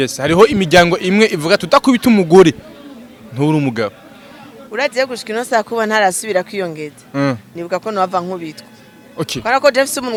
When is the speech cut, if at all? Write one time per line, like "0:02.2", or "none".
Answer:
none